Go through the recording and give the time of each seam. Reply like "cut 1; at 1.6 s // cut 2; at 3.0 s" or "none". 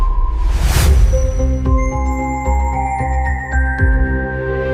none